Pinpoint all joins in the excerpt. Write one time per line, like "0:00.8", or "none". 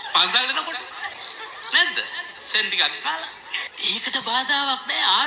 0:01.2
0:03.7